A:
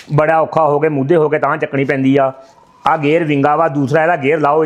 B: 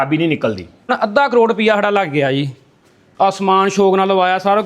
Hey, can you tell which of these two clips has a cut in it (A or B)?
B